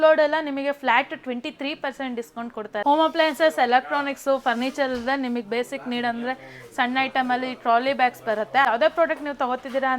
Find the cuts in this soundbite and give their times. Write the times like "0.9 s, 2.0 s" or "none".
2.8 s, 8.7 s